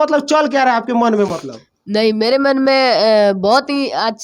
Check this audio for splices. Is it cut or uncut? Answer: uncut